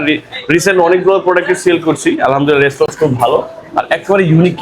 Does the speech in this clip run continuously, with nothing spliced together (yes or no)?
yes